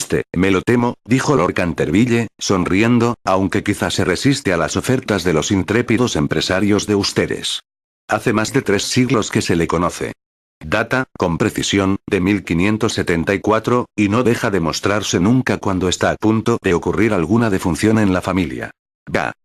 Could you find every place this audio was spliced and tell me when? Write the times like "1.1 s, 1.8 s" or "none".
7.1 s